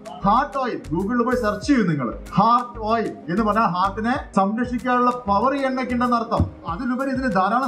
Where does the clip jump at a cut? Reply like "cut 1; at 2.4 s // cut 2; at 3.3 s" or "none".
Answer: cut 1; at 2.2 s // cut 2; at 3.2 s // cut 3; at 4.2 s // cut 4; at 6.8 s